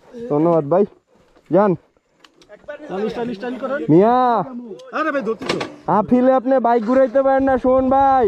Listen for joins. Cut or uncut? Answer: uncut